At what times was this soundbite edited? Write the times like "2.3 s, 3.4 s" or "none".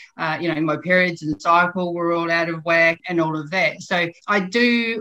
3.0 s, 4.2 s